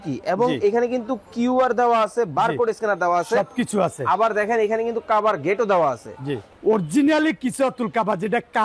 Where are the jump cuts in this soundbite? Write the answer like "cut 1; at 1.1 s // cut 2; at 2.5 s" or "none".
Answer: cut 1; at 6.4 s

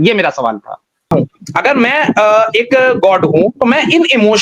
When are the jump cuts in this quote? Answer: cut 1; at 1.1 s

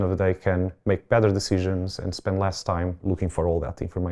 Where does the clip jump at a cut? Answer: cut 1; at 3.0 s

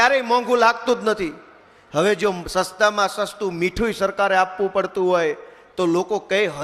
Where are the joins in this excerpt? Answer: none

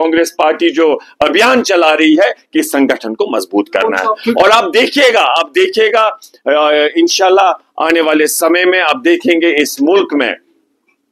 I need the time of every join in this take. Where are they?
cut 1; at 3.4 s

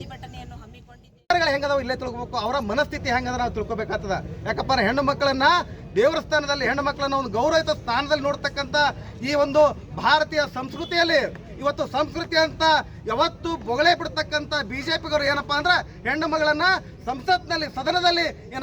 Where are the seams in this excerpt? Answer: cut 1; at 1.2 s

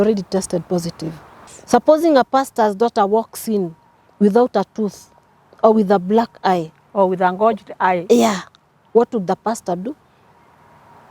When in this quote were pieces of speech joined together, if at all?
cut 1; at 1.6 s

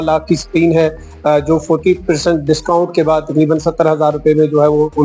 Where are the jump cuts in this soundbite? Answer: none

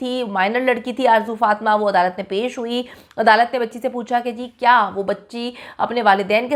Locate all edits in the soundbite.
none

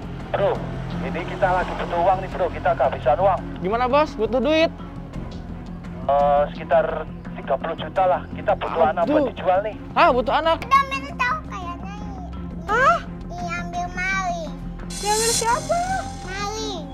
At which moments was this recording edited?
cut 1; at 10.6 s

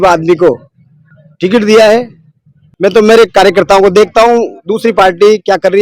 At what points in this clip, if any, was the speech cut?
cut 1; at 2.6 s

